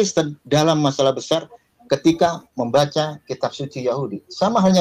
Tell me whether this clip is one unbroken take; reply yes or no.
yes